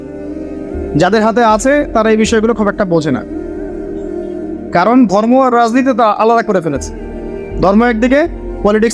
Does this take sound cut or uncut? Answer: cut